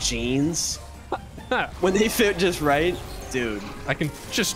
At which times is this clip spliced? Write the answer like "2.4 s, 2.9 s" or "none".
1.7 s